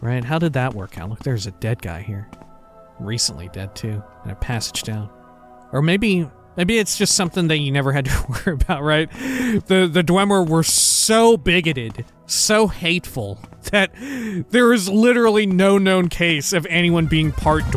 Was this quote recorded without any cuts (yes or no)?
no